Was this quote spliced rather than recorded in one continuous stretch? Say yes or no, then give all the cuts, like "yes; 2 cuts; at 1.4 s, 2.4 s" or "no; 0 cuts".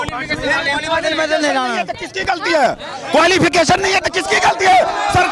no; 0 cuts